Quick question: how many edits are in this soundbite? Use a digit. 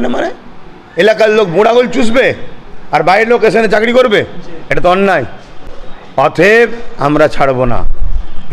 0